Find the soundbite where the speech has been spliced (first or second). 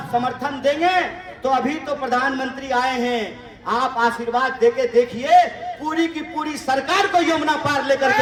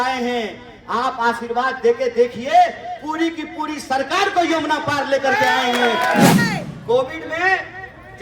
second